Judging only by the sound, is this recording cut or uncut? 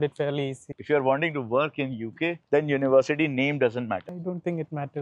cut